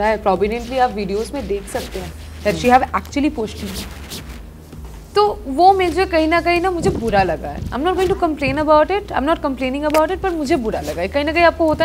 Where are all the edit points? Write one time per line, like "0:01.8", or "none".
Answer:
none